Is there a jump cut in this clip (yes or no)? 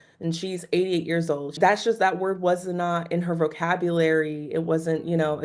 yes